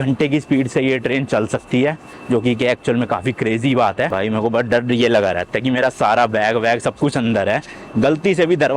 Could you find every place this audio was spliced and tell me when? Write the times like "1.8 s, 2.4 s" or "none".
none